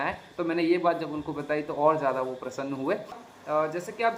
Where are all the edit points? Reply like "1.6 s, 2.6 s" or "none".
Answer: 3.2 s